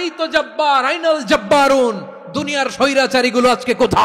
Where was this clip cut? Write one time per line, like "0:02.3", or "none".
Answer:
none